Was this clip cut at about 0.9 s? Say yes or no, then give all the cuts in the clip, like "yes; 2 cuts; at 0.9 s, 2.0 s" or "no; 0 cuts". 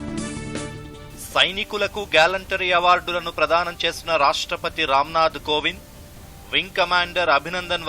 yes; 1 cut; at 0.9 s